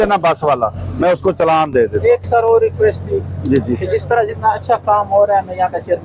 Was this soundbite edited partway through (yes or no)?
no